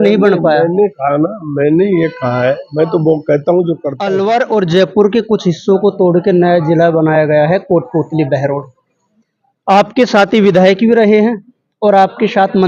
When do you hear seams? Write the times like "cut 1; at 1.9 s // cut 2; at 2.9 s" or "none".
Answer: cut 1; at 3.9 s